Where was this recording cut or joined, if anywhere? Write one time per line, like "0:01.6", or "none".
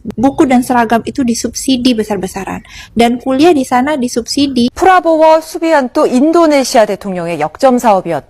0:04.7